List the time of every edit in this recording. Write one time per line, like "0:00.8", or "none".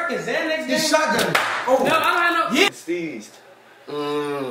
0:02.7